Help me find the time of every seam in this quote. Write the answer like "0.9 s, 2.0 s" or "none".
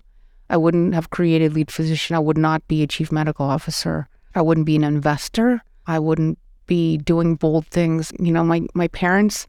4.2 s, 5.7 s, 8.1 s